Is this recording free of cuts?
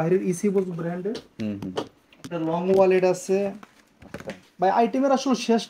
yes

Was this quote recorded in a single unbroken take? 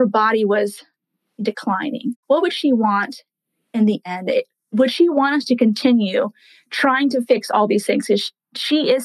no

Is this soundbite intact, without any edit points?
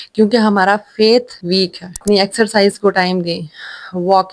no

